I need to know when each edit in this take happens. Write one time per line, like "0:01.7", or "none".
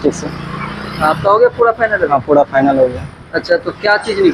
none